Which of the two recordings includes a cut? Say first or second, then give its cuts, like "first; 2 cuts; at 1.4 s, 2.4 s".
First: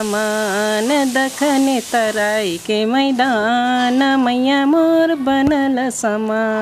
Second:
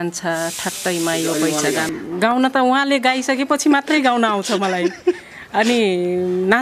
second; 1 cut; at 1.9 s